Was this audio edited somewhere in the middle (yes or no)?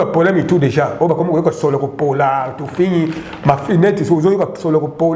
no